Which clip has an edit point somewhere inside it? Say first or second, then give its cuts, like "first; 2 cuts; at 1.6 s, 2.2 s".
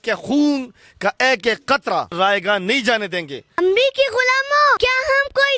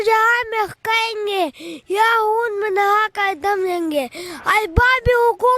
first; 3 cuts; at 2.1 s, 3.6 s, 4.8 s